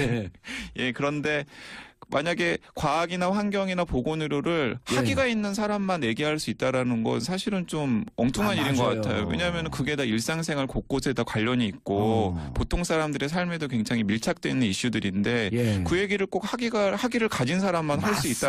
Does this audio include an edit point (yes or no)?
no